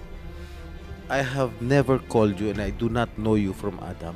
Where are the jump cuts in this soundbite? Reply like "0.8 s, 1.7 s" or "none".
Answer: 1.0 s